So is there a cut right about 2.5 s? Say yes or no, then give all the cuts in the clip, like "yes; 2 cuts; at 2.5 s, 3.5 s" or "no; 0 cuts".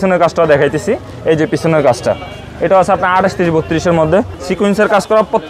no; 1 cut; at 4.4 s